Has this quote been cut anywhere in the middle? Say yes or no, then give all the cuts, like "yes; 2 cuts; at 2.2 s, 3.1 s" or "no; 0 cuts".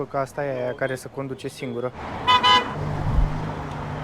yes; 2 cuts; at 2.0 s, 2.8 s